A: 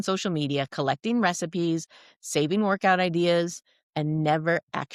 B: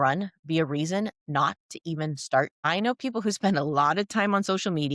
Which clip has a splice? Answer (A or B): B